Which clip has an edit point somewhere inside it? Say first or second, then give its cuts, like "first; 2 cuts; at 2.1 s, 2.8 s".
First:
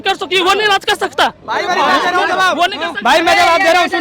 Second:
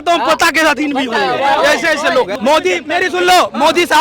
second; 1 cut; at 2.3 s